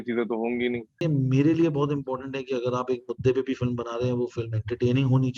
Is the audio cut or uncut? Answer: cut